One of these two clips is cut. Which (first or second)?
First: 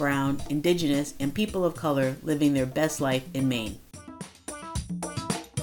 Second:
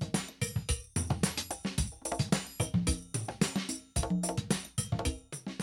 first